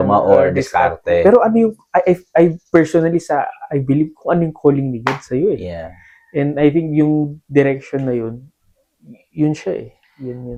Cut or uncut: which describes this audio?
uncut